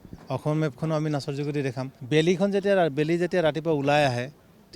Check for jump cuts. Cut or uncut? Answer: cut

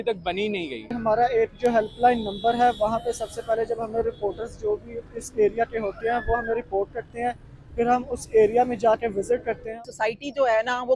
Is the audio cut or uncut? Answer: cut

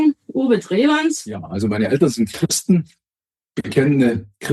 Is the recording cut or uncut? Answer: cut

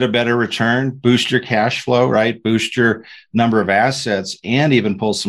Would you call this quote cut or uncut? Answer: uncut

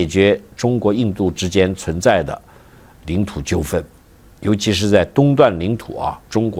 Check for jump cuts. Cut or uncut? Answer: uncut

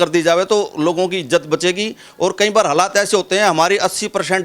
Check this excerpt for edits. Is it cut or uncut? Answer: uncut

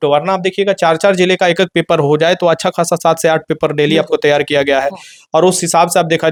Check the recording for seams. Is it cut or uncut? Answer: uncut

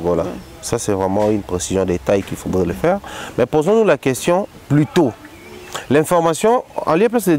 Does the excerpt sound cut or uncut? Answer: uncut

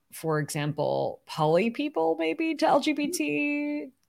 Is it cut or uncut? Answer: uncut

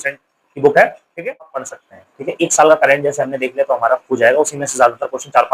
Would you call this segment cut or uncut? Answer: cut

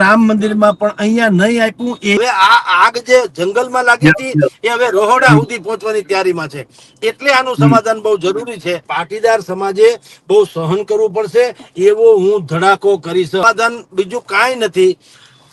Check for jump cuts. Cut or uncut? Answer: cut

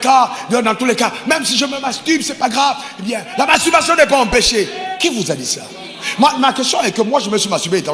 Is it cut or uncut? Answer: uncut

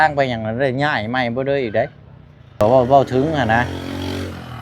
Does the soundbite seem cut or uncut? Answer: cut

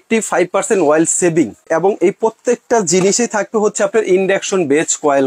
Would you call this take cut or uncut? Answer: cut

